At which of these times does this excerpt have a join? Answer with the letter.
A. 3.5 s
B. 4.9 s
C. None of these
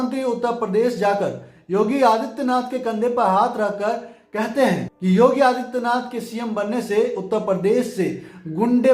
B